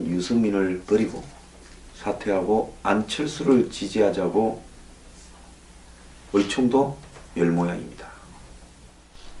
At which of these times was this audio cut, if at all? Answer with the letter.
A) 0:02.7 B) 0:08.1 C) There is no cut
C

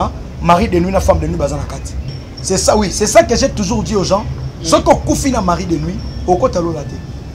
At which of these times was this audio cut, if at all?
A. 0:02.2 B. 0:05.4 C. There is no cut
A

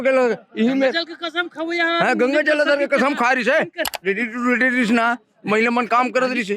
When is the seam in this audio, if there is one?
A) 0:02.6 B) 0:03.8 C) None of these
B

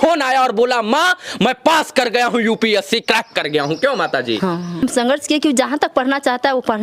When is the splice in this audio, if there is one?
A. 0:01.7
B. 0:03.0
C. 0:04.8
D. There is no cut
C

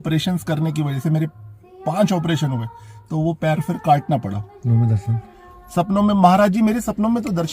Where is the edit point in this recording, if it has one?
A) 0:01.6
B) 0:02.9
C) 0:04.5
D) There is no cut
C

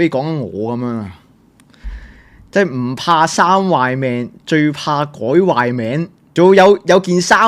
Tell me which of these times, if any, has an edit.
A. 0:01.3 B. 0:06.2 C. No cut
B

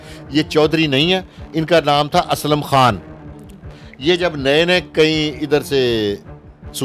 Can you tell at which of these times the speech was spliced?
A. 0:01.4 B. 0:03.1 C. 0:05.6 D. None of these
D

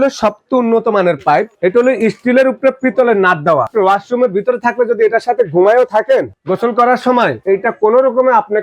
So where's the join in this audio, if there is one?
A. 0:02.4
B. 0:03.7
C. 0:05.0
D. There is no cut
B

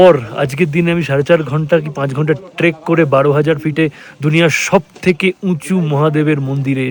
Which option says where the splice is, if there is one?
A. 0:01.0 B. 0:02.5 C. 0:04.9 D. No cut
D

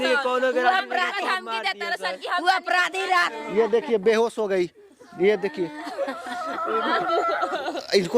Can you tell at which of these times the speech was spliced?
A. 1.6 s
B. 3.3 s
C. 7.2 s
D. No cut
B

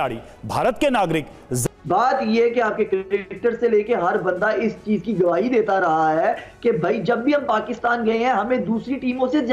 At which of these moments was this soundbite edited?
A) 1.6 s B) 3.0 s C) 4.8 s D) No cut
A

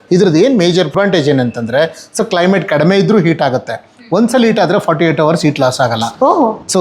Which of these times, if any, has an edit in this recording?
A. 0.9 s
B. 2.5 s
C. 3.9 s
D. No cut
A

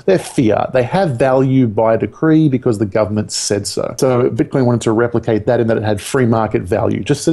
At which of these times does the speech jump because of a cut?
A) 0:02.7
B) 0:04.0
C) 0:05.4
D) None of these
B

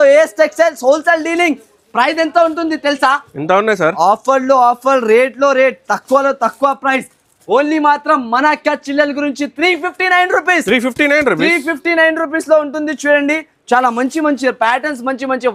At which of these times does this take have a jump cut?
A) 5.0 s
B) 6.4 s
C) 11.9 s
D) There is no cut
D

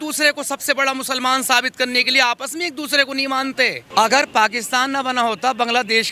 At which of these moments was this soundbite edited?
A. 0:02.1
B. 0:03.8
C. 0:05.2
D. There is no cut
B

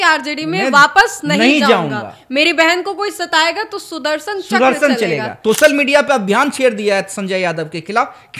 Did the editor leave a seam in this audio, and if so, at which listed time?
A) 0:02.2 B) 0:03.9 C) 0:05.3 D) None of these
C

